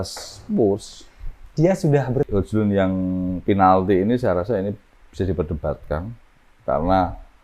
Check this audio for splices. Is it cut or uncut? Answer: cut